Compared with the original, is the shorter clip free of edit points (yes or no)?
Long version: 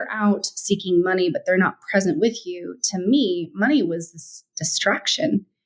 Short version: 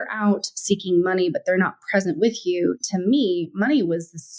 yes